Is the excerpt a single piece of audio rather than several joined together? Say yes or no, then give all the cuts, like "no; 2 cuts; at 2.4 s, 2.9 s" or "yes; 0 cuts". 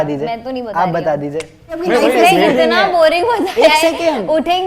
no; 1 cut; at 1.8 s